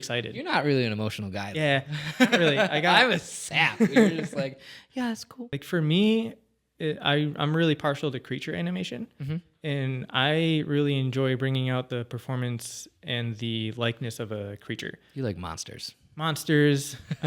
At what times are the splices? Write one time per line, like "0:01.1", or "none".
0:05.5